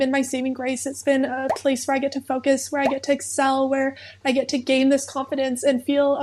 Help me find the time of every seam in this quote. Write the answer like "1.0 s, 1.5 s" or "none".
none